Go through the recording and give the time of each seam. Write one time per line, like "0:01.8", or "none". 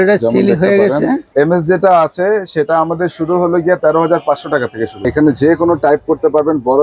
0:01.3
0:05.0